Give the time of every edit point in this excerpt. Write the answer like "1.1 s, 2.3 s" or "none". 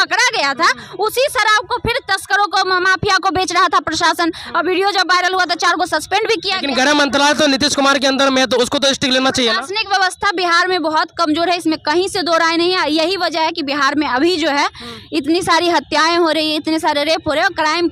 none